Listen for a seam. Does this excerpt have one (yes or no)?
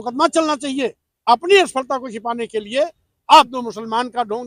yes